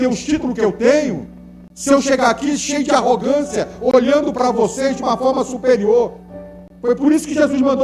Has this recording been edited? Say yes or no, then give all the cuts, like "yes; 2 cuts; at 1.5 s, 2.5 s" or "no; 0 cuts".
no; 0 cuts